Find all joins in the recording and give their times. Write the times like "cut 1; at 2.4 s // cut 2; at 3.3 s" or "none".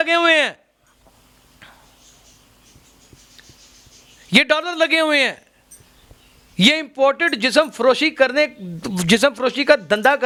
none